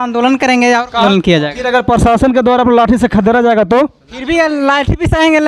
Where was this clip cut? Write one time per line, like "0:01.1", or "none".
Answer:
0:01.0